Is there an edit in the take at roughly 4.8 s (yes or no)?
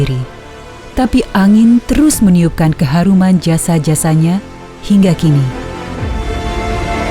no